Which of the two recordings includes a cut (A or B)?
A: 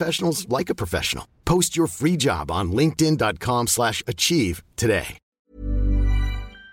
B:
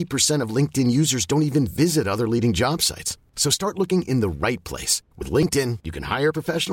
A